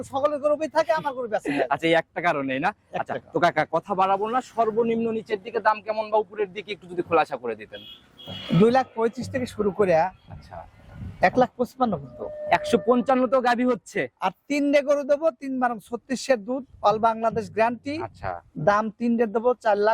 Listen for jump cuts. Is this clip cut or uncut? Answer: uncut